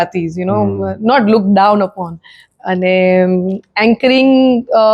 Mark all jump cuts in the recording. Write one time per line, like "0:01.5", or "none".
none